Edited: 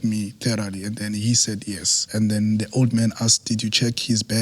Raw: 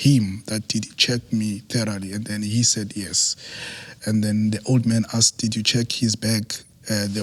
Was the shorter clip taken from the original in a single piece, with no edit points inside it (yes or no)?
no